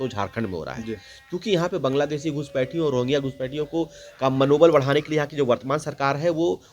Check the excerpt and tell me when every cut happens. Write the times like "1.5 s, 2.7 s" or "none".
none

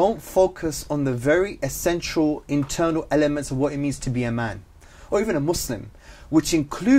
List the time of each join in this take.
none

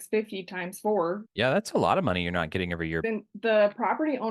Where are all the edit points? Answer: 1.2 s, 3.0 s

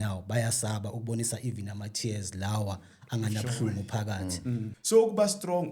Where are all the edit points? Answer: 4.7 s

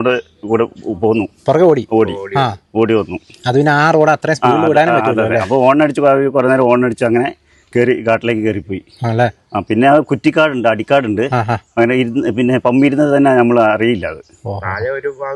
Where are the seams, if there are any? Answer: none

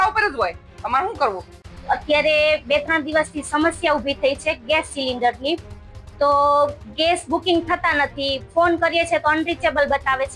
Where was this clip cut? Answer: none

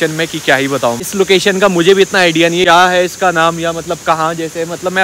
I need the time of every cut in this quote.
none

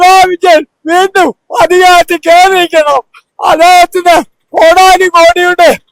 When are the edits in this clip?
none

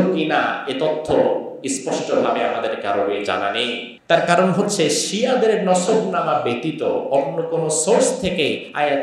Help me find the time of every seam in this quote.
3.9 s

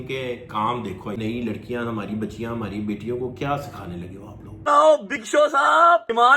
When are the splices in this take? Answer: 1.2 s, 4.7 s

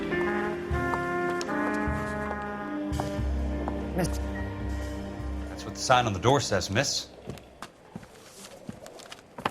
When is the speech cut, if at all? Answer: 3.9 s

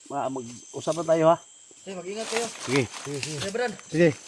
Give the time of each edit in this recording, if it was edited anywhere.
none

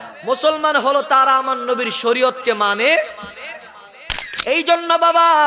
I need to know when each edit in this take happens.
4.3 s

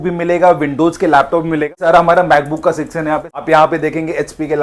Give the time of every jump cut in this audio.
1.7 s, 3.3 s

